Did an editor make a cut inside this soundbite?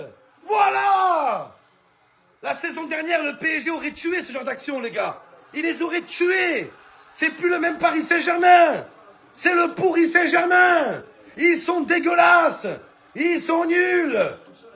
no; 0 cuts

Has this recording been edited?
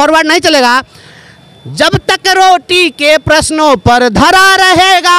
no; 0 cuts

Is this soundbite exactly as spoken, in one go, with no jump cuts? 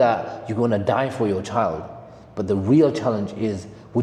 yes; 0 cuts

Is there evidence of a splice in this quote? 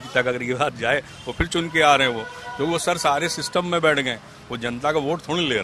no; 0 cuts

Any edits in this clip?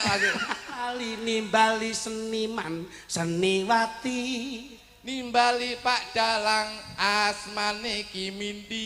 yes; 1 cut; at 1.1 s

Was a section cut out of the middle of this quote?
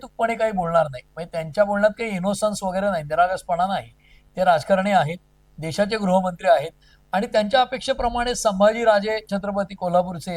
no; 0 cuts

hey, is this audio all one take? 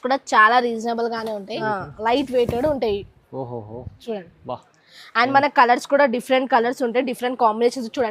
no; 1 cut; at 1.6 s

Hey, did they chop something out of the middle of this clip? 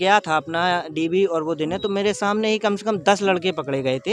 no; 0 cuts

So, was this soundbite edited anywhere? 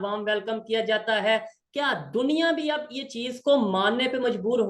no; 0 cuts

